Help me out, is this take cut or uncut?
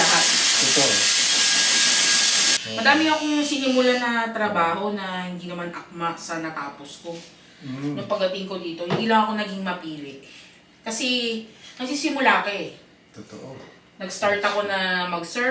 cut